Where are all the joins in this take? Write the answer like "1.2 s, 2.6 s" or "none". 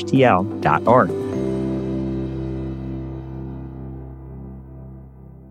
1.1 s